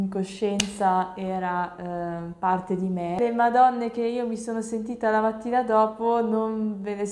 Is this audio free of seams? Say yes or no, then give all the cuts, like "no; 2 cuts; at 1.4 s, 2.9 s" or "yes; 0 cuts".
no; 1 cut; at 3.2 s